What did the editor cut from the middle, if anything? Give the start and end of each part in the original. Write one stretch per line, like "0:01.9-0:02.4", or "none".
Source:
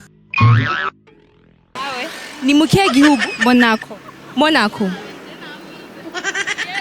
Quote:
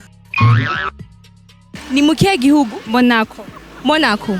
0:01.7-0:02.2